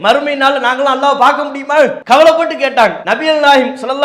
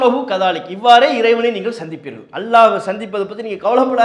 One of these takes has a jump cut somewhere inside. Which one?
first; 2 cuts; at 2.0 s, 3.1 s

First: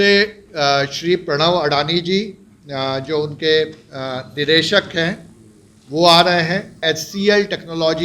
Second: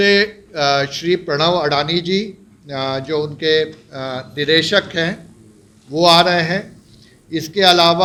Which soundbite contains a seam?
first; 1 cut; at 6.8 s

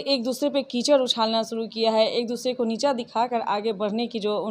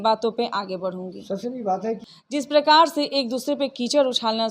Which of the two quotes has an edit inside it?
second; 1 cut; at 2.1 s

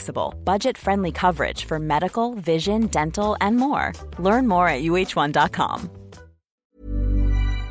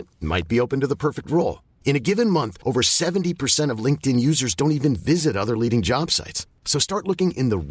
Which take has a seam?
first; 1 cut; at 6.7 s

